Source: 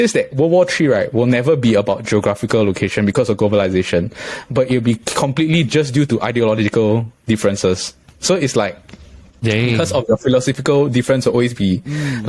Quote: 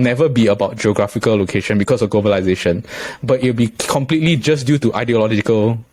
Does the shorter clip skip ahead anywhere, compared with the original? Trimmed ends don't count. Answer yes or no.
no